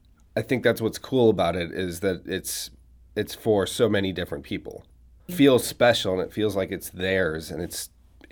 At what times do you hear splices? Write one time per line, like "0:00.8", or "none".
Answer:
0:05.3